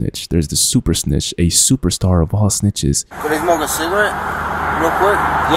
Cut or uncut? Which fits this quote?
cut